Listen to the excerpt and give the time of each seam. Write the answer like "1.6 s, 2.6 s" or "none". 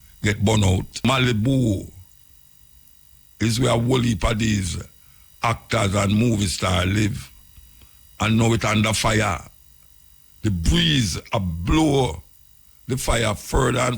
1.0 s